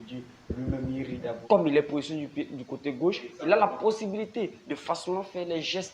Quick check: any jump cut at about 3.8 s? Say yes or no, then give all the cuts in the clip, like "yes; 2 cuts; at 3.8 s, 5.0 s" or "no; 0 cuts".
no; 1 cut; at 1.4 s